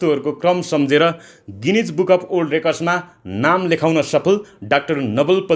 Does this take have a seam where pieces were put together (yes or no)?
no